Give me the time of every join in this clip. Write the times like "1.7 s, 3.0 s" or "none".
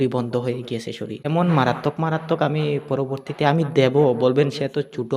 1.2 s